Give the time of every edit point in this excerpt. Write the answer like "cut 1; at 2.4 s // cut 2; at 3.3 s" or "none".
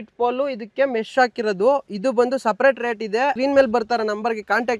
cut 1; at 3.4 s